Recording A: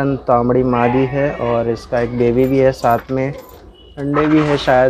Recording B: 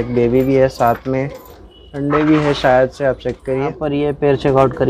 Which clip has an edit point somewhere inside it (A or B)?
B